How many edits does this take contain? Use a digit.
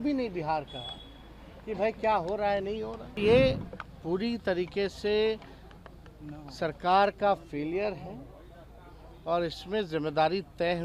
1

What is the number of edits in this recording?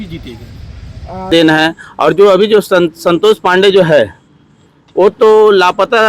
1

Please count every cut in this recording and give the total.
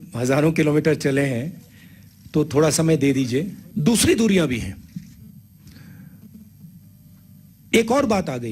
1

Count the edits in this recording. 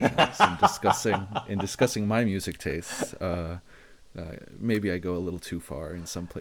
1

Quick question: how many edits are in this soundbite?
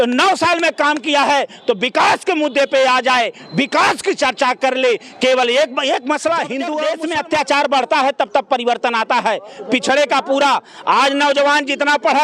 1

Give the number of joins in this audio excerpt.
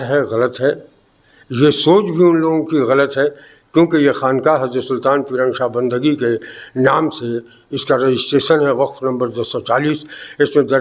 0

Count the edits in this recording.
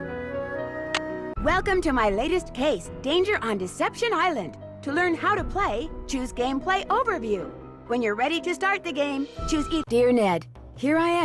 3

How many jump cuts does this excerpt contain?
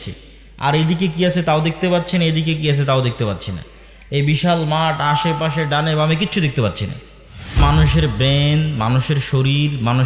1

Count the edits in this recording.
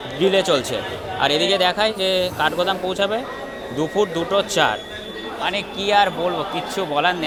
0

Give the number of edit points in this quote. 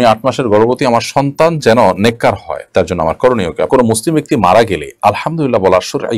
1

